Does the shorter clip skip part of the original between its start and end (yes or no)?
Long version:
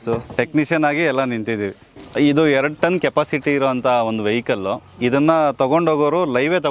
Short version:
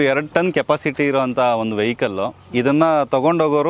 no